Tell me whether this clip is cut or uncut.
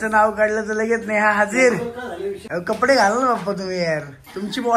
cut